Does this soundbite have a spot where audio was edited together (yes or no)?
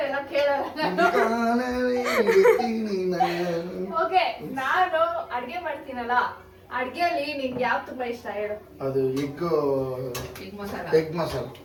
no